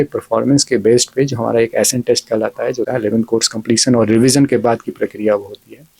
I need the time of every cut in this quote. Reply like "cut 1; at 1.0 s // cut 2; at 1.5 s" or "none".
cut 1; at 2.9 s